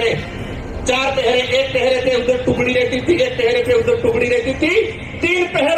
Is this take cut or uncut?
uncut